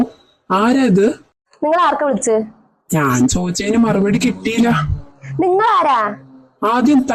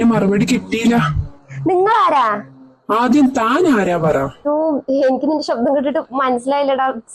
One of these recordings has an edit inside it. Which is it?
second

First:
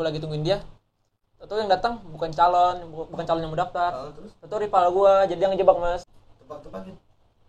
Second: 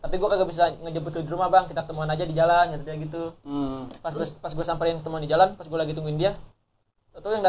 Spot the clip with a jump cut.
first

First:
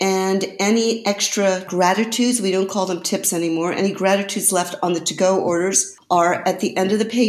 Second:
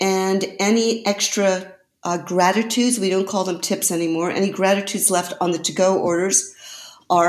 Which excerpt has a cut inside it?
first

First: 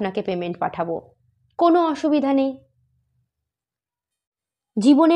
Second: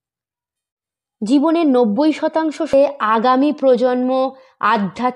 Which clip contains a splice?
second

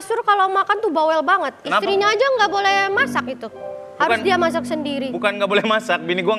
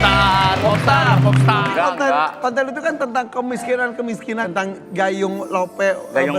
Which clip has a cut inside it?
second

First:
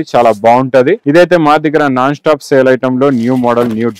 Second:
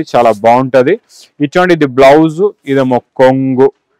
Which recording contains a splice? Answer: first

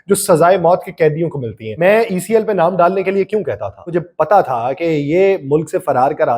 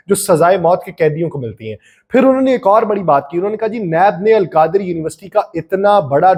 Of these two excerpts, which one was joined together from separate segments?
first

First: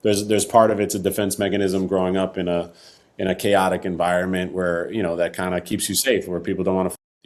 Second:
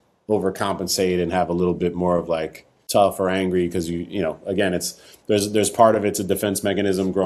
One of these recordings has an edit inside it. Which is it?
second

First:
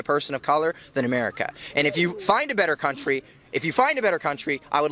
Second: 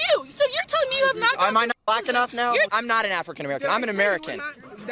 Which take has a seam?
second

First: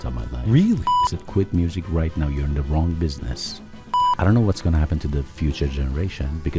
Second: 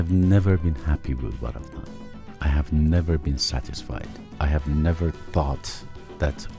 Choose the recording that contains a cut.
first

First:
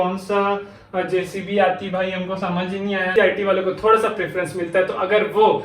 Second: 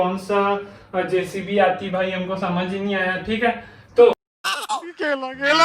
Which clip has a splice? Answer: first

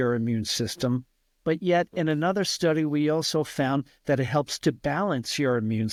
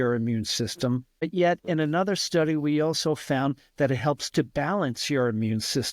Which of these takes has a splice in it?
second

